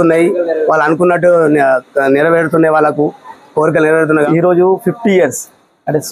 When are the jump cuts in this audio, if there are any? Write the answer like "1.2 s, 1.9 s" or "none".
4.3 s